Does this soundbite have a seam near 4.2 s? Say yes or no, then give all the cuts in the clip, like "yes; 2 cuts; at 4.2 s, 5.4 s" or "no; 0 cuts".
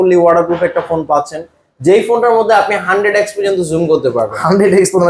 no; 0 cuts